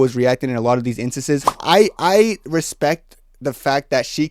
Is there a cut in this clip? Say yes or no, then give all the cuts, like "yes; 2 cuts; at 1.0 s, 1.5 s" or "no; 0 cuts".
yes; 1 cut; at 1.5 s